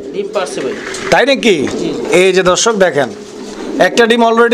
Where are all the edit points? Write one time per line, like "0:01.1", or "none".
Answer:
none